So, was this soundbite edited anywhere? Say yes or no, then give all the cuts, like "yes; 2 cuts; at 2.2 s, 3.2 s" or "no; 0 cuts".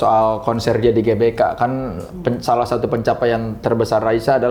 no; 0 cuts